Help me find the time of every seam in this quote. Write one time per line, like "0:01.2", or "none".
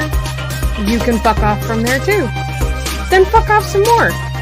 none

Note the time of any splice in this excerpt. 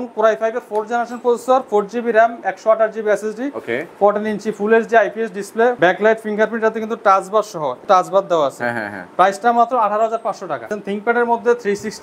0:05.8
0:07.8
0:10.8

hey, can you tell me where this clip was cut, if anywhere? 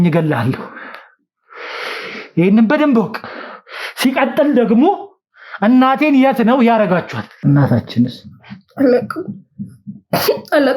0:07.2

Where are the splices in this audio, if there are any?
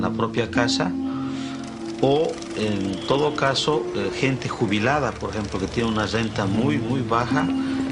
none

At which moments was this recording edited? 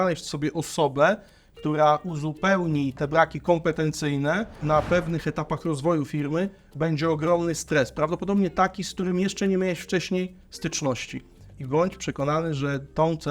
0:03.0
0:04.6
0:11.4

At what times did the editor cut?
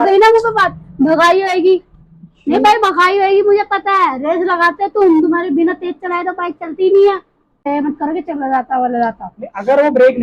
0:07.6

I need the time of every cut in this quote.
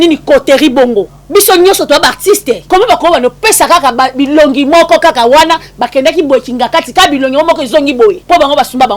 0:01.2
0:02.6
0:08.2

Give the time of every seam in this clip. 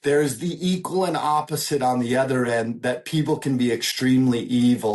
none

